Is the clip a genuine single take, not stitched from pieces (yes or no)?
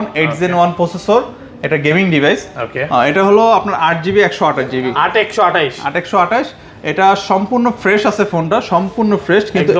yes